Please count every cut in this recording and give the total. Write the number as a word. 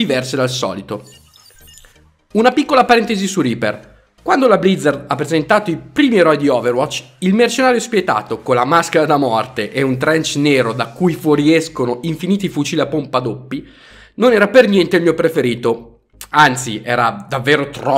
one